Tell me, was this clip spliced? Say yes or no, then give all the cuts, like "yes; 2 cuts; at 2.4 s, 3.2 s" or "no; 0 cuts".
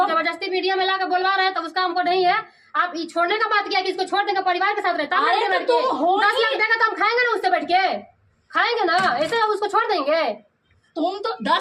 no; 0 cuts